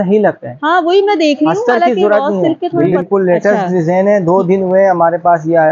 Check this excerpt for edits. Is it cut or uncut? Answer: cut